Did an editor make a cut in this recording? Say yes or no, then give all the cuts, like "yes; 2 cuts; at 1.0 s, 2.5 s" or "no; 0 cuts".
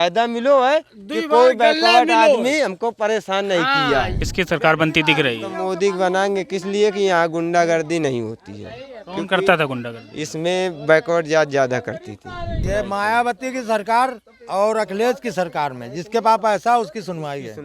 yes; 2 cuts; at 4.2 s, 12.5 s